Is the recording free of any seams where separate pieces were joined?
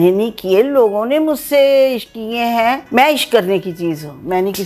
yes; 0 cuts

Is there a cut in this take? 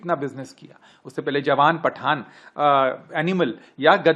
no; 0 cuts

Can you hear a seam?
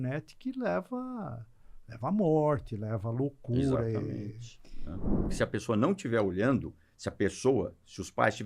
yes; 1 cut; at 5.1 s

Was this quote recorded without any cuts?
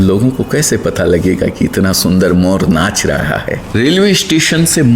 no; 1 cut; at 3.6 s

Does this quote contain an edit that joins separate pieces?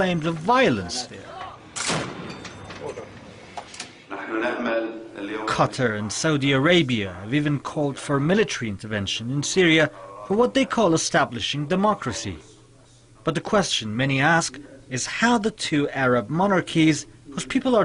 yes; 1 cut; at 3.3 s

